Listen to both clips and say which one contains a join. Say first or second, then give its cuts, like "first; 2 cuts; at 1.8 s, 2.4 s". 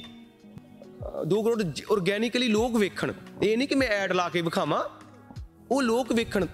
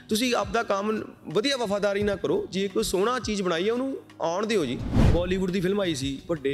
second; 1 cut; at 5.0 s